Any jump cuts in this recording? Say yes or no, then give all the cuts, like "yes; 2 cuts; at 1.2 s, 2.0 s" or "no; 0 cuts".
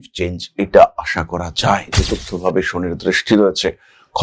yes; 1 cut; at 2.0 s